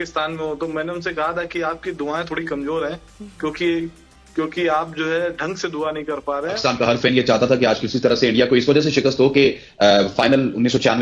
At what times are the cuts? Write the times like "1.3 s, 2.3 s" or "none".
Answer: 7.0 s